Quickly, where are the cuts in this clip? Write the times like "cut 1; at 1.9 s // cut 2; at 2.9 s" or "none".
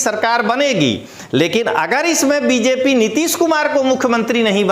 none